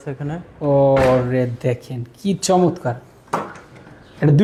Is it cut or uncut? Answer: uncut